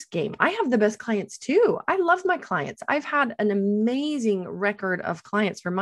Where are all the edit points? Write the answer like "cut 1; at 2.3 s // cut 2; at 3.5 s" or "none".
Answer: none